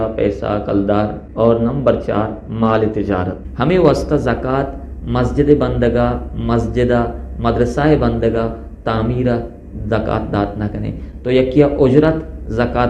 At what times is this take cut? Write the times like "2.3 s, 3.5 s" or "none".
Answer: 1.2 s, 3.4 s